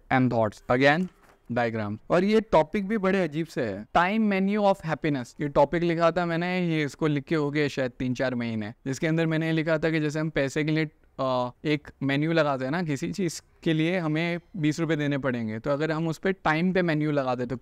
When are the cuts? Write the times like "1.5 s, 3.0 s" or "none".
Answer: none